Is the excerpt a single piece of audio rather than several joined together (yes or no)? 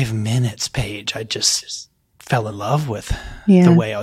yes